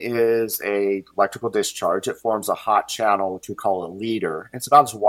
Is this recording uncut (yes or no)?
yes